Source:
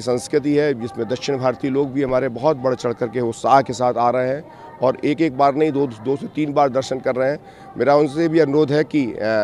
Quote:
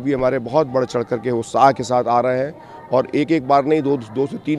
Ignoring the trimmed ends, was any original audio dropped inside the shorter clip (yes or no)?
no